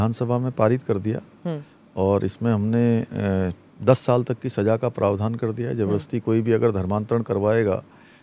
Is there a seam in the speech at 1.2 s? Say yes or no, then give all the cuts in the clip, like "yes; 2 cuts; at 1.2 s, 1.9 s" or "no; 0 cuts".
no; 0 cuts